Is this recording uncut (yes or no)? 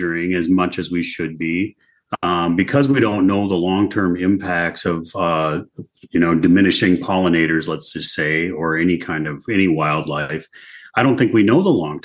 yes